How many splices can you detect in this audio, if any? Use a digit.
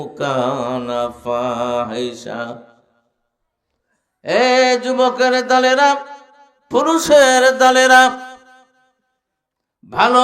0